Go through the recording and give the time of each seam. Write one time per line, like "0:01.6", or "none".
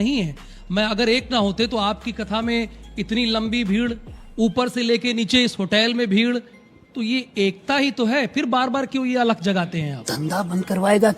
0:10.2